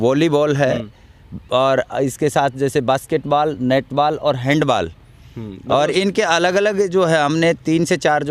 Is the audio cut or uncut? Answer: uncut